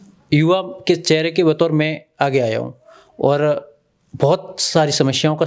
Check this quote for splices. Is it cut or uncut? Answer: uncut